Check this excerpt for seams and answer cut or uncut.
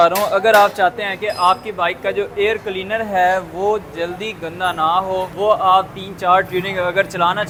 uncut